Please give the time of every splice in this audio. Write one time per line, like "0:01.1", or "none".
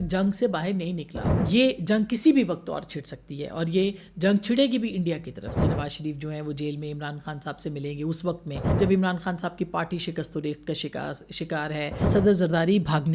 0:01.3
0:05.6
0:08.6
0:12.1